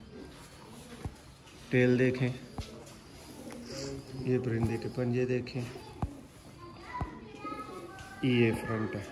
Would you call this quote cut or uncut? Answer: uncut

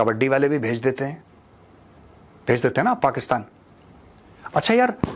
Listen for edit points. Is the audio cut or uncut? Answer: uncut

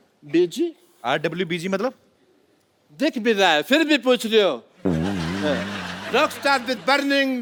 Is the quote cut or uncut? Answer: uncut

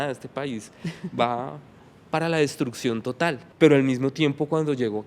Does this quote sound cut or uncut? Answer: cut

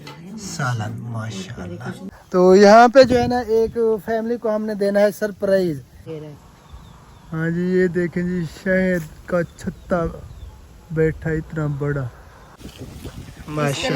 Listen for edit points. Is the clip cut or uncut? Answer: cut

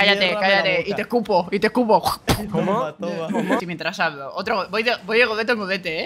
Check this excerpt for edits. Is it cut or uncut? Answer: cut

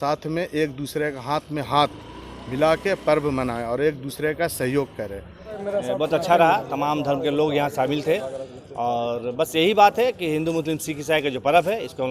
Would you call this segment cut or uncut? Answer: cut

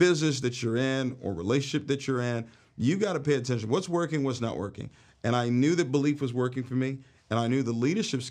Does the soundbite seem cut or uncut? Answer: uncut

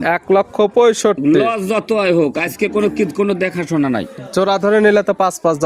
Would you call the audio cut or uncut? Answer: uncut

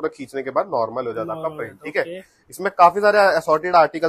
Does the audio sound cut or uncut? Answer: uncut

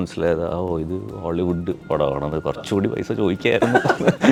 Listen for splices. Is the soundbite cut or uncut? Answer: uncut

